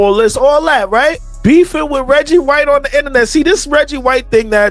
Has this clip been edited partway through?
yes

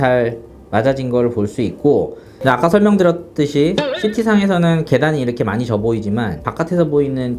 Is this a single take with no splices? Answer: no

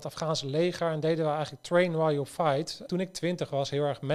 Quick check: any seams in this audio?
yes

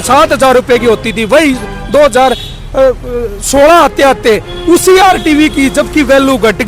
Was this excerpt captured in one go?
yes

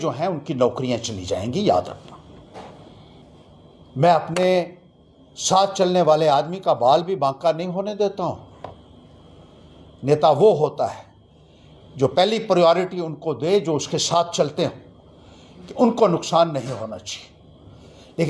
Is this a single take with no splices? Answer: no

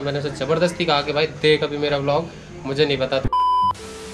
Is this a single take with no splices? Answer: no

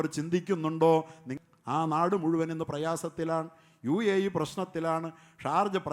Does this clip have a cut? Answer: yes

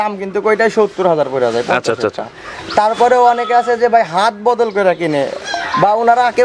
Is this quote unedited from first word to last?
yes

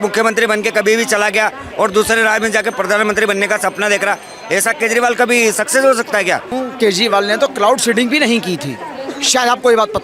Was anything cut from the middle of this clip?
yes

